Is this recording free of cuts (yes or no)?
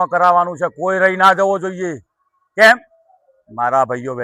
yes